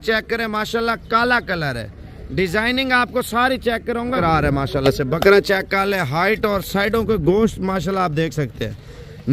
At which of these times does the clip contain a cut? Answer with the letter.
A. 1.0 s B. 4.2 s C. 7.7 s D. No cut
B